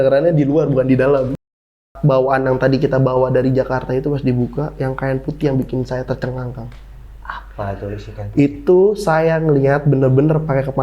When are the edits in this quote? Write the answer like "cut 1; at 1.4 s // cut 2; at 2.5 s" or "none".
cut 1; at 1.5 s